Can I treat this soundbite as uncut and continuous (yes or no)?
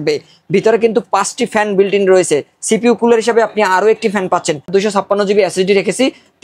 no